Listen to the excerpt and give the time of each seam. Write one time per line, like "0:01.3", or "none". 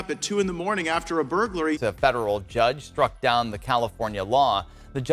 0:01.8

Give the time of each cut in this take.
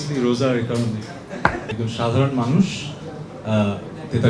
0:01.7

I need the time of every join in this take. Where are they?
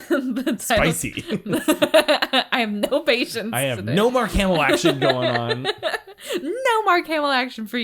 none

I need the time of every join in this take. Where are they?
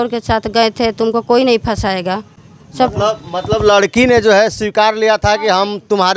none

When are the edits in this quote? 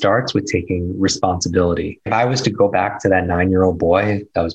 0:02.1

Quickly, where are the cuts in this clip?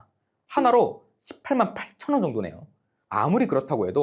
0:03.0

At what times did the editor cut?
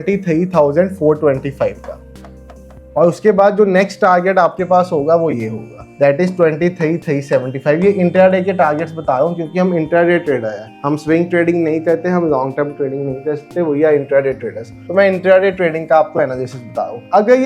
none

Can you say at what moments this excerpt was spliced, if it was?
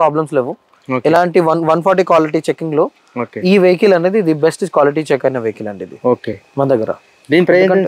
none

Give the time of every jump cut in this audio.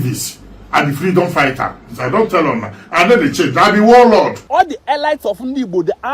0:04.4

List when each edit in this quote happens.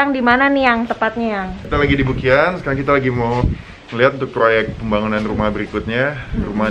none

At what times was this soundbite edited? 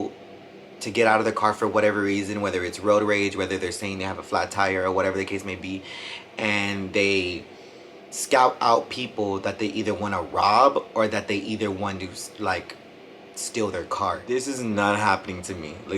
0:14.3

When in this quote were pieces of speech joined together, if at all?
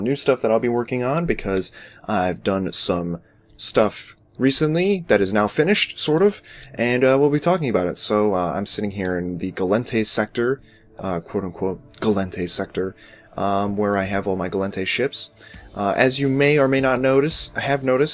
none

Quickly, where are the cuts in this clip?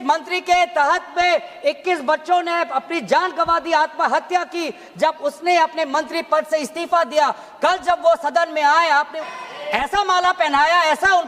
0:09.2

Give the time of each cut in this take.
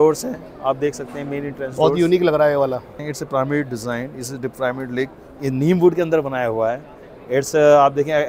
0:03.0

